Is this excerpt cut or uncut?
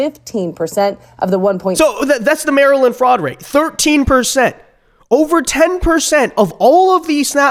uncut